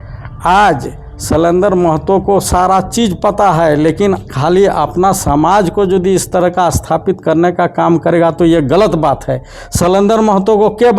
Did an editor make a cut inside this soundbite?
no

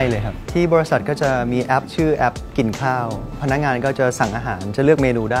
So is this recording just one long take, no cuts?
yes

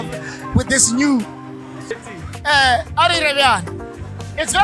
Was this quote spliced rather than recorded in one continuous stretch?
yes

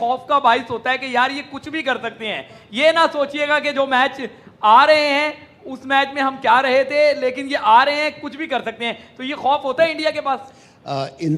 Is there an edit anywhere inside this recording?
no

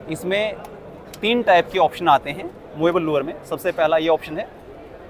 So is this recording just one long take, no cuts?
yes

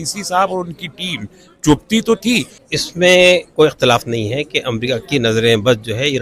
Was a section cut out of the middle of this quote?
yes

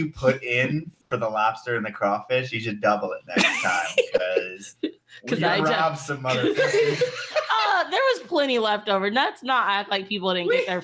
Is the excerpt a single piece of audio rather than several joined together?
no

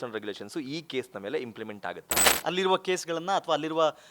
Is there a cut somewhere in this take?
yes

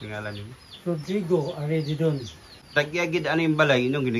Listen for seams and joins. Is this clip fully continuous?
no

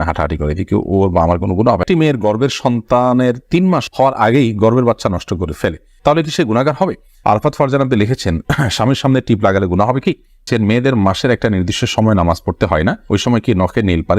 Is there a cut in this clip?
yes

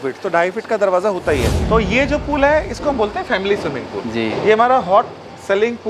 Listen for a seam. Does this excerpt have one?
yes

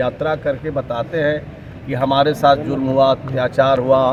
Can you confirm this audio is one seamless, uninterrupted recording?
yes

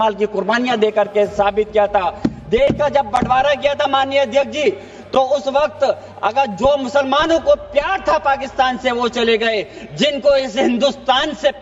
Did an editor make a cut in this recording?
no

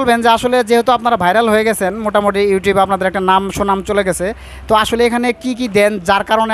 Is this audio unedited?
yes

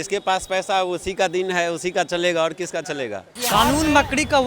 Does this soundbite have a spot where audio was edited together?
yes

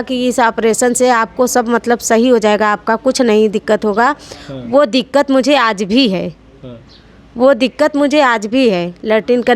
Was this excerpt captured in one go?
yes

